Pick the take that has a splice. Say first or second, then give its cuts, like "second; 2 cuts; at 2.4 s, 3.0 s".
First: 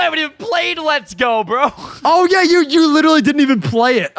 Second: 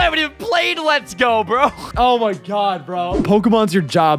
second; 2 cuts; at 1.9 s, 3.2 s